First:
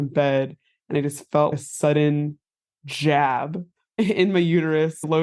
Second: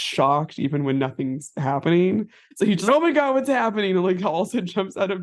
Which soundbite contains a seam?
second; 1 cut; at 2.4 s

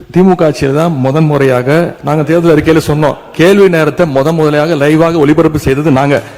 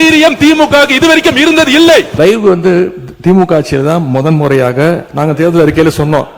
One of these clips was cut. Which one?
second; 1 cut; at 2.1 s

